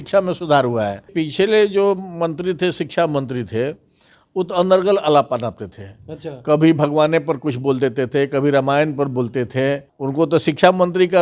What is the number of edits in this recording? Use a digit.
2